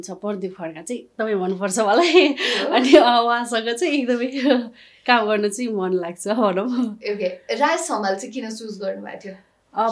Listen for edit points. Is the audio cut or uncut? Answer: uncut